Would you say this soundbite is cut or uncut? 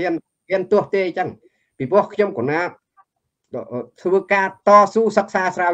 uncut